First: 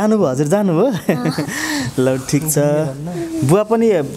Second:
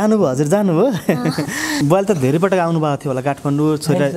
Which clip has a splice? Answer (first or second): second